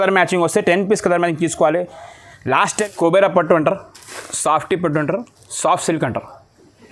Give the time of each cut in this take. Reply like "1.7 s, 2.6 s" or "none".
2.8 s

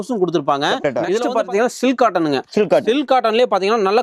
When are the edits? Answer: 1.2 s

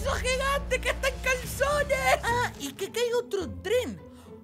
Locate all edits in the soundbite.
2.2 s

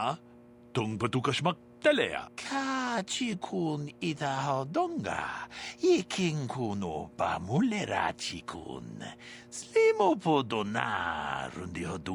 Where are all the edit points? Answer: none

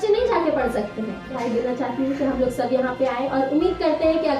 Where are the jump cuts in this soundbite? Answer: 1.4 s

